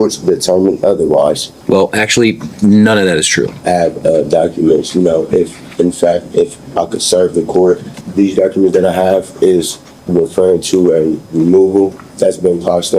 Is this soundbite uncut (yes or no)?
no